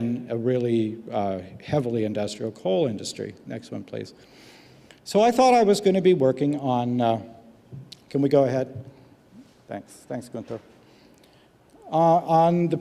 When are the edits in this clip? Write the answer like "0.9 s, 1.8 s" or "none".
3.4 s